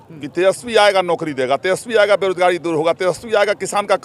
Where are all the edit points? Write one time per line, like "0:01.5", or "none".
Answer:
none